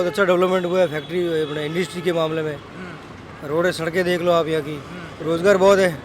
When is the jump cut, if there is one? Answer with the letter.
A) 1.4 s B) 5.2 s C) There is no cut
B